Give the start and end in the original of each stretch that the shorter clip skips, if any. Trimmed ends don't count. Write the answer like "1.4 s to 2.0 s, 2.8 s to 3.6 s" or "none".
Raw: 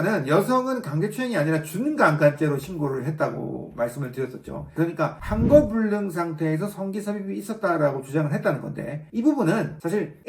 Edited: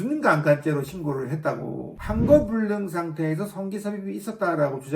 3.7 s to 5.2 s